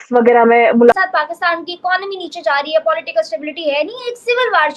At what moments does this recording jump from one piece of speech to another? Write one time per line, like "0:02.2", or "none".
0:00.9